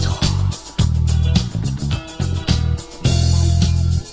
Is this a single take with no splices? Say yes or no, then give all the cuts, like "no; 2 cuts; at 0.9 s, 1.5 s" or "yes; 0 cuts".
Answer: no; 1 cut; at 3.0 s